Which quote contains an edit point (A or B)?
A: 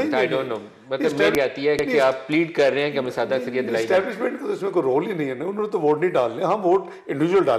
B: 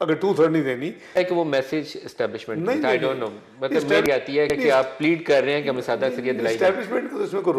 B